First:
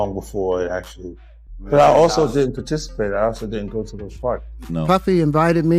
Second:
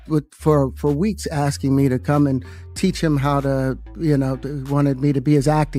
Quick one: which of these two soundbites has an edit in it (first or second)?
first